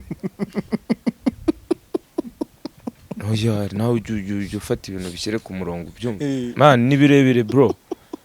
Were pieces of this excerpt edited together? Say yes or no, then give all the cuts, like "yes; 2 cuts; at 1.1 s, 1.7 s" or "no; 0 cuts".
yes; 1 cut; at 6.5 s